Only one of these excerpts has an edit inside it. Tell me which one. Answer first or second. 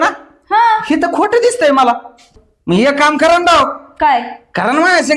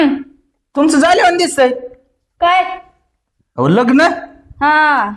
first